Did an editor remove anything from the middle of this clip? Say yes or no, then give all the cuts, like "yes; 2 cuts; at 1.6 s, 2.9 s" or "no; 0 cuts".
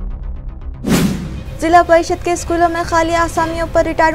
no; 0 cuts